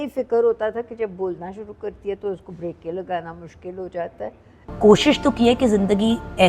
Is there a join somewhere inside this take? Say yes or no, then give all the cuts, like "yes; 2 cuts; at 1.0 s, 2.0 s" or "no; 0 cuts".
yes; 1 cut; at 4.6 s